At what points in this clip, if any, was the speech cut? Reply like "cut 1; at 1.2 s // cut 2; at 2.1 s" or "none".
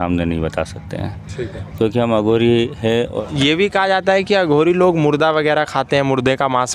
cut 1; at 3.2 s